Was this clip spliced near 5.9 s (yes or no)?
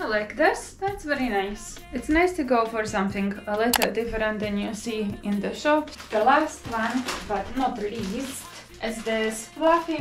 yes